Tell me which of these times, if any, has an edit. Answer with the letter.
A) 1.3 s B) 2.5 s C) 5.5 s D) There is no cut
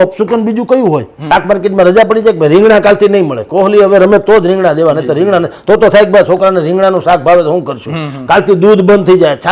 A